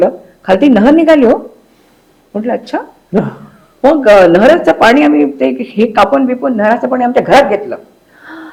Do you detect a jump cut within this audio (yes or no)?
no